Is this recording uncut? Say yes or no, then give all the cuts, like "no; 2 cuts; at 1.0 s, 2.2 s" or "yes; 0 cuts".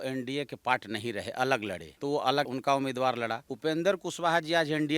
yes; 0 cuts